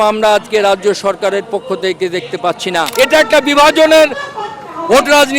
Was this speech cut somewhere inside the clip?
yes; 1 cut; at 2.9 s

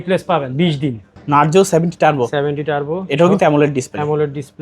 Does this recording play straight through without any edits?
no; 1 cut; at 1.2 s

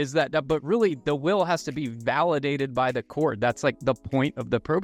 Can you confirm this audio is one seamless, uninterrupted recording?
yes; 0 cuts

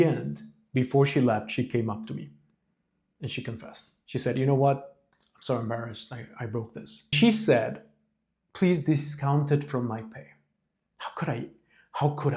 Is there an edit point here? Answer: yes; 1 cut; at 7.1 s

